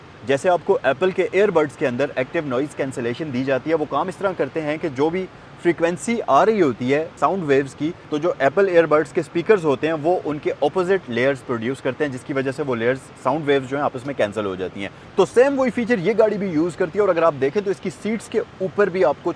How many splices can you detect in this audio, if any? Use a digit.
0